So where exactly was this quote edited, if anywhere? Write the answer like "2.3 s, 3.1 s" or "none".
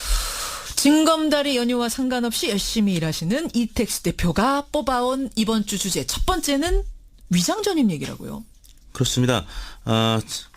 9.6 s